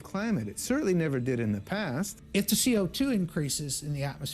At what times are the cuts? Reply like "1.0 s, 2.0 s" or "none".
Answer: 2.2 s